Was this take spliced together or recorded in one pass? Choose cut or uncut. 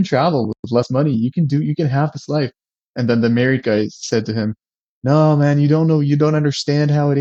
uncut